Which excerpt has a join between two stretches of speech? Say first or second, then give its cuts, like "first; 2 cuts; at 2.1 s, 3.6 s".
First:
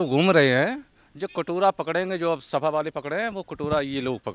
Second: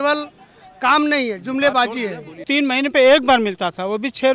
second; 1 cut; at 2.4 s